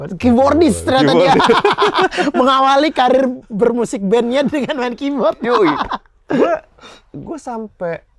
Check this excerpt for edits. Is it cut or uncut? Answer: uncut